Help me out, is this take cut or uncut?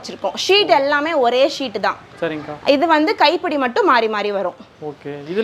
uncut